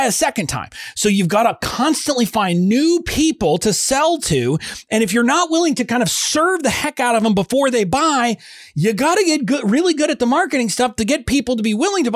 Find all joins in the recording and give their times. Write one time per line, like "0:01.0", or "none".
none